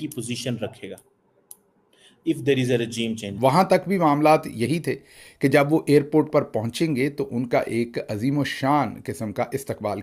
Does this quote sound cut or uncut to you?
cut